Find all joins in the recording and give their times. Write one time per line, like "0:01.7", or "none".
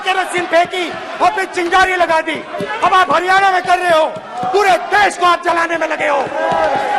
none